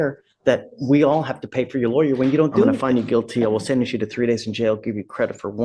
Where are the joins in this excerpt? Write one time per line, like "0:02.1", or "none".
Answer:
0:02.8

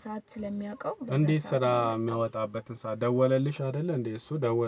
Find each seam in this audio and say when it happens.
none

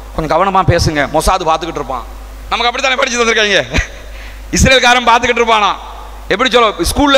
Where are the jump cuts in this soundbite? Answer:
none

